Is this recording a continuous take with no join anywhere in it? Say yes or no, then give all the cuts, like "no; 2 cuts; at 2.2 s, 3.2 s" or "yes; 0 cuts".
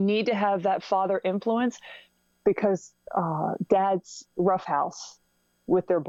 yes; 0 cuts